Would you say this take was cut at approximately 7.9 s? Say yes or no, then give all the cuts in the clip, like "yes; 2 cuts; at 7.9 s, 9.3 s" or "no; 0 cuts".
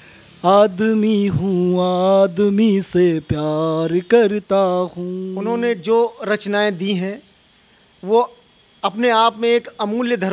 no; 1 cut; at 5.2 s